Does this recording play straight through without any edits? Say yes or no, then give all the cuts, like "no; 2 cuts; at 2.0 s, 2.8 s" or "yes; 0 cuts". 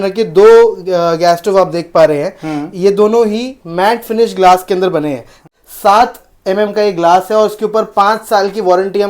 no; 1 cut; at 5.5 s